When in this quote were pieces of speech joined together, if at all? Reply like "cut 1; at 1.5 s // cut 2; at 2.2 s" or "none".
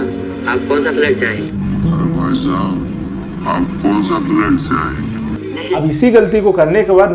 cut 1; at 5.8 s